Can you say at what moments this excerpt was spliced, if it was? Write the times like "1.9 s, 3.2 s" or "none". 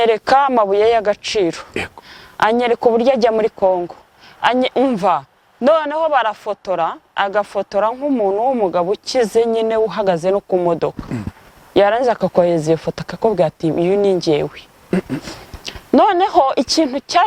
none